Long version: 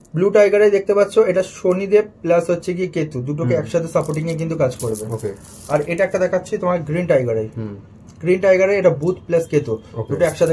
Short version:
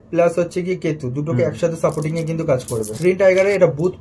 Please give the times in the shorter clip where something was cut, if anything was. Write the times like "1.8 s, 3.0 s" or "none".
2.9 s